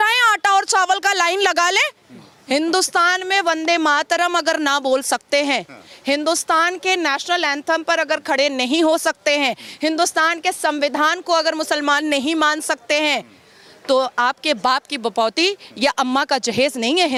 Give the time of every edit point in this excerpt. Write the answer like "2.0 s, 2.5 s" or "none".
none